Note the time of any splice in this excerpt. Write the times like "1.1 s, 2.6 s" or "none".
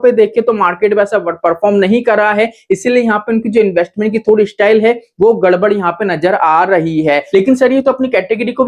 7.2 s